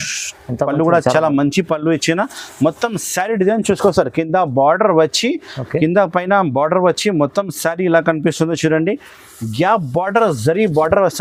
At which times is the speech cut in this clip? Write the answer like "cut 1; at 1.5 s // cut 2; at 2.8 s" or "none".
none